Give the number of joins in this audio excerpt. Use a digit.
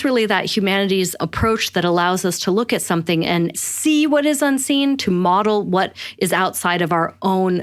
2